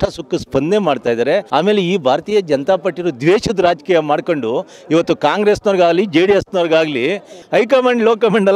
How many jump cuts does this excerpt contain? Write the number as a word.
two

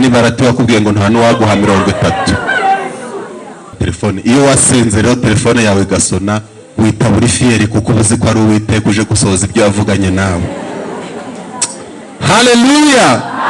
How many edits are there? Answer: one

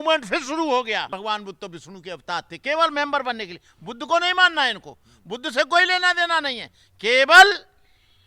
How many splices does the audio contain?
one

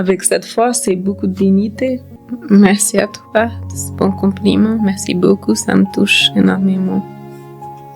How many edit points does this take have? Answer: one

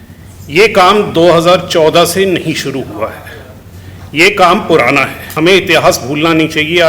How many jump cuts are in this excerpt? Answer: one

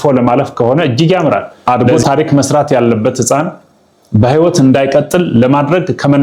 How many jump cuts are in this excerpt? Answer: one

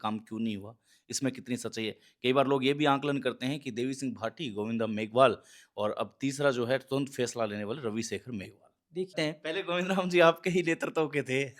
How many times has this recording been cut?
one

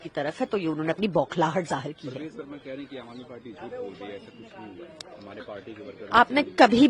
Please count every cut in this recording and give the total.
zero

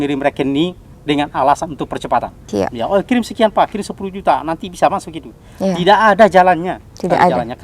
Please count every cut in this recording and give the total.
one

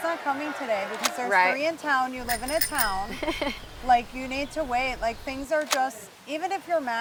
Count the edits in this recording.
zero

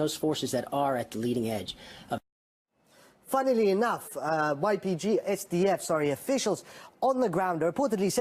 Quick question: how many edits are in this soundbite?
zero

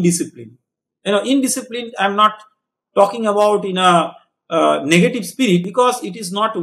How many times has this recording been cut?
one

